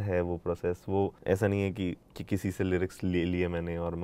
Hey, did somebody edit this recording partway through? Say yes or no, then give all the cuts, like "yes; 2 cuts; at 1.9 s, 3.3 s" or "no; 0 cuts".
yes; 2 cuts; at 1.2 s, 2.1 s